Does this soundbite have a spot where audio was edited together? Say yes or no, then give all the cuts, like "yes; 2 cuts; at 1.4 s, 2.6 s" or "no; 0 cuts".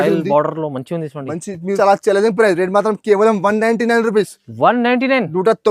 yes; 1 cut; at 1.8 s